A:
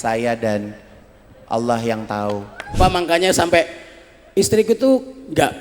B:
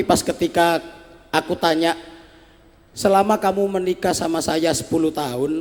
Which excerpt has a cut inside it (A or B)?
A